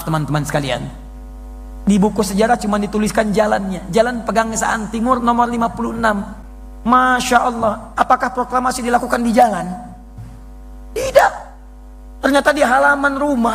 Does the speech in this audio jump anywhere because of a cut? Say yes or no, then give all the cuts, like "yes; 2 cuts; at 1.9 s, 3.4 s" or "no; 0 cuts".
no; 0 cuts